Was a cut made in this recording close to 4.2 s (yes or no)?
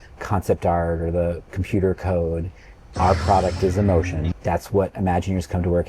yes